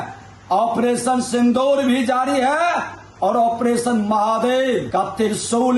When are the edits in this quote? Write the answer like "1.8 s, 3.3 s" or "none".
4.9 s